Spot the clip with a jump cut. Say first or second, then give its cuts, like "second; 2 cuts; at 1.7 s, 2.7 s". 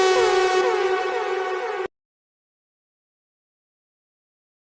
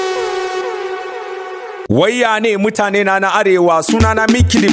second; 1 cut; at 1.8 s